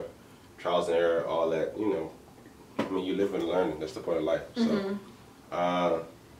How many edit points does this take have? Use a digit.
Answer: 0